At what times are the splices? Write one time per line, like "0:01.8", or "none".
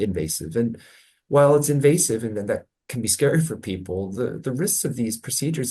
none